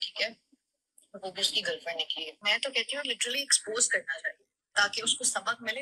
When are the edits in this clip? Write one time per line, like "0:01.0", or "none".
0:02.4